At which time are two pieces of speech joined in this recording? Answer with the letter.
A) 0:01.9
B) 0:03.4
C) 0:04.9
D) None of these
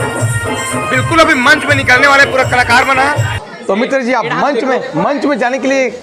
B